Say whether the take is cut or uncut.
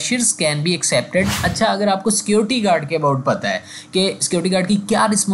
cut